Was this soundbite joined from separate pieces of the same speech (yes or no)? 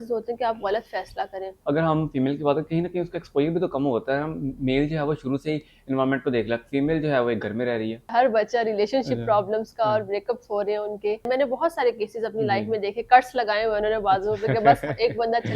yes